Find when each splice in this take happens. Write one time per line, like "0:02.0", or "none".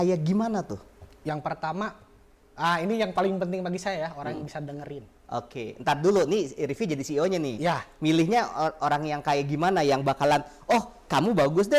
none